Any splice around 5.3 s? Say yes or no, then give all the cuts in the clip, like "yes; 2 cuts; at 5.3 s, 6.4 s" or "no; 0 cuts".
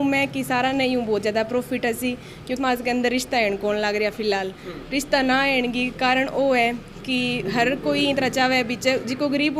no; 1 cut; at 2.6 s